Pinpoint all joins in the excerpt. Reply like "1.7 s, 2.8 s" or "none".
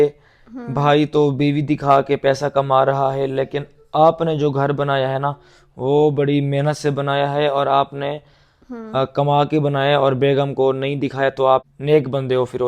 11.7 s